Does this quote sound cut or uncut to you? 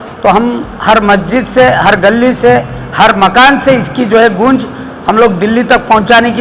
uncut